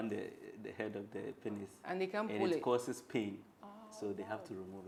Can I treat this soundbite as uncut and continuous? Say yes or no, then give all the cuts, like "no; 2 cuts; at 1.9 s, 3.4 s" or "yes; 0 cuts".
yes; 0 cuts